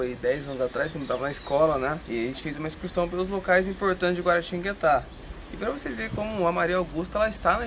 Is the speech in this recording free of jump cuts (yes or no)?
no